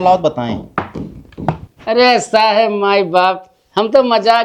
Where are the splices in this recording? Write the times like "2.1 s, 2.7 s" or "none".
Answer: 1.7 s